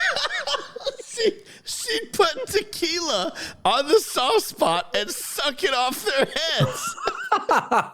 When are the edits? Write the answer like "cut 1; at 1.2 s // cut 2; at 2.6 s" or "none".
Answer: none